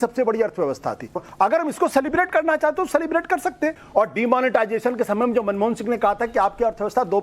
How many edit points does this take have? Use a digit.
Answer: 2